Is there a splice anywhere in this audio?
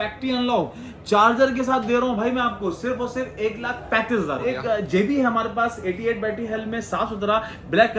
yes; 1 cut; at 4.6 s

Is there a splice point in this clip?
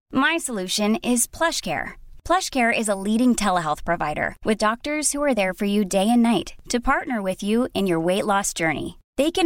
no; 0 cuts

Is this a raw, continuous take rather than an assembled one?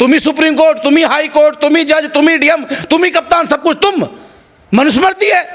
yes; 0 cuts

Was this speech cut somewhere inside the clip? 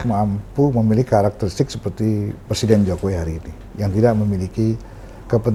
no; 0 cuts

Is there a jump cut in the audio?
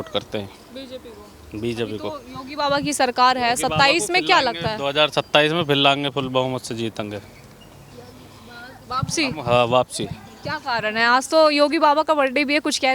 no; 0 cuts

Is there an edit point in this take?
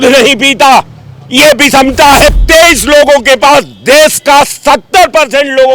yes; 1 cut; at 2.4 s

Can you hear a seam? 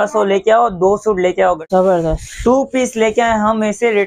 yes; 1 cut; at 1.6 s

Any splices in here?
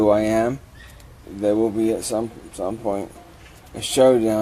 yes; 1 cut; at 1.1 s

